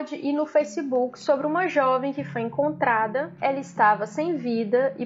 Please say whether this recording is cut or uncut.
cut